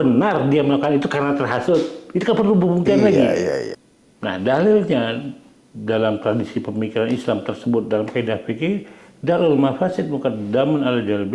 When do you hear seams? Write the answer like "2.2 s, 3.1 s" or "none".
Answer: 3.8 s